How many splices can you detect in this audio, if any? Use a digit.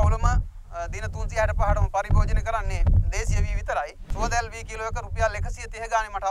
1